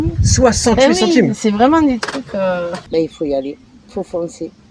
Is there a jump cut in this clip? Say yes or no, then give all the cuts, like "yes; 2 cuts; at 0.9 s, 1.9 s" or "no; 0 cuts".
yes; 1 cut; at 2.8 s